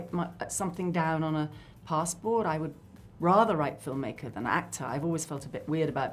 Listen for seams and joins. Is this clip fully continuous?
yes; 0 cuts

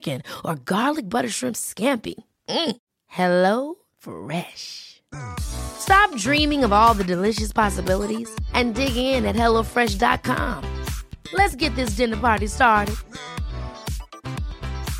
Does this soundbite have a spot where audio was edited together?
no; 0 cuts

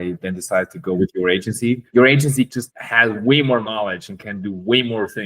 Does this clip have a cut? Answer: yes; 2 cuts; at 1.8 s, 2.6 s

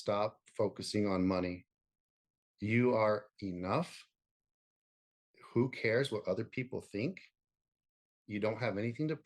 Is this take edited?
no; 0 cuts

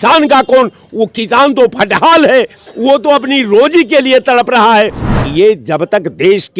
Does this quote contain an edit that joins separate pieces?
yes; 1 cut; at 5.0 s

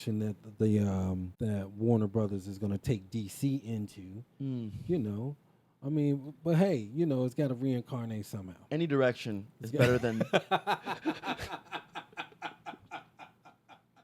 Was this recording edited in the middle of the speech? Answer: yes; 1 cut; at 1.3 s

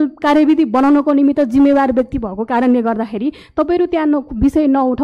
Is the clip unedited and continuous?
yes; 0 cuts

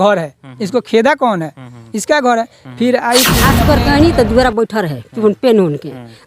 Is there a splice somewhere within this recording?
yes; 1 cut; at 3.6 s

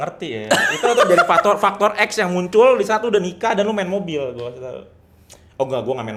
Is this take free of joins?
yes; 0 cuts

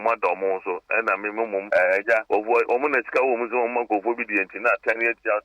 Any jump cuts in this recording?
yes; 2 cuts; at 1.6 s, 2.2 s

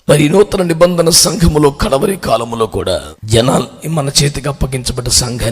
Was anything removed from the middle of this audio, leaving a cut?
yes; 1 cut; at 3.1 s

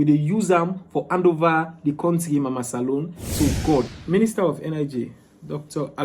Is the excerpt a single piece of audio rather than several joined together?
no; 1 cut; at 4.0 s

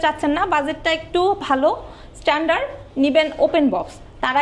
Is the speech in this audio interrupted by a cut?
no; 0 cuts

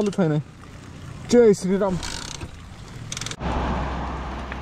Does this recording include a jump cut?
yes; 1 cut; at 3.3 s

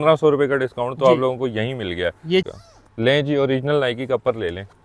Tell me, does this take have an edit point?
yes; 1 cut; at 2.5 s

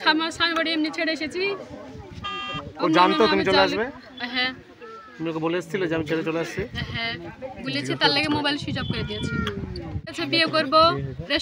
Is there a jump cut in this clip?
yes; 1 cut; at 10.2 s

